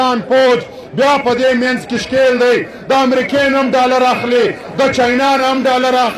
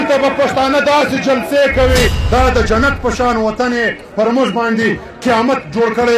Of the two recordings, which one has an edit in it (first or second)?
second